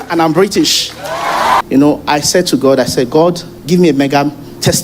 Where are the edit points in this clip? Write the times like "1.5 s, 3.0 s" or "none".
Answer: 1.6 s